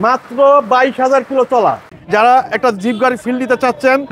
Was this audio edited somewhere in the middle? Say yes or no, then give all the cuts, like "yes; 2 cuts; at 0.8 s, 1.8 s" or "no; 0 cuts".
yes; 1 cut; at 1.9 s